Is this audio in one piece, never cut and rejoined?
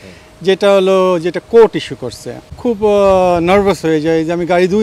no; 1 cut; at 2.5 s

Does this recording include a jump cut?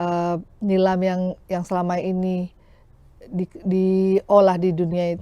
no; 0 cuts

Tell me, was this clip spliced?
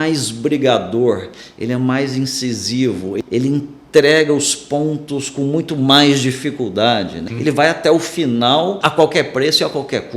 yes; 3 cuts; at 3.2 s, 7.2 s, 8.8 s

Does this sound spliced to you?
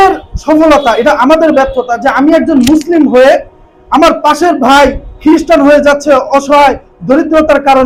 no; 0 cuts

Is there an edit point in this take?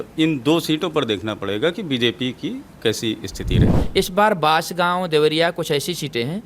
yes; 1 cut; at 3.7 s

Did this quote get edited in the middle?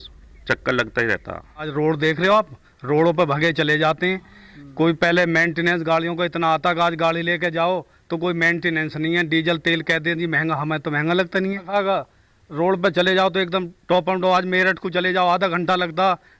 yes; 2 cuts; at 1.7 s, 11.7 s

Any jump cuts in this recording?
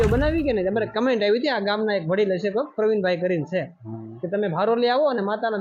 no; 0 cuts

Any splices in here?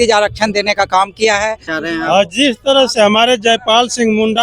yes; 1 cut; at 1.7 s

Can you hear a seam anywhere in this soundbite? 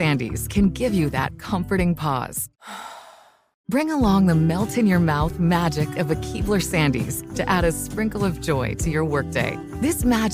no; 0 cuts

